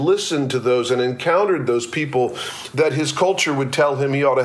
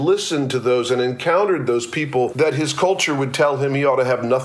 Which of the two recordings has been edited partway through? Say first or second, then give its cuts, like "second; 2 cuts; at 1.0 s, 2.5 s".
second; 1 cut; at 2.3 s